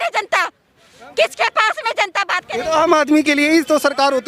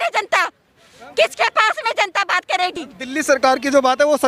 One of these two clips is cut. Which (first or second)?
first